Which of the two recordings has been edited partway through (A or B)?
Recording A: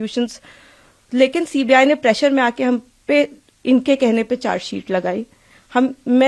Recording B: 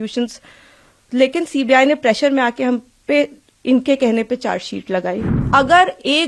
B